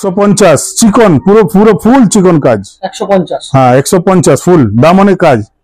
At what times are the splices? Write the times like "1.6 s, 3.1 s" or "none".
none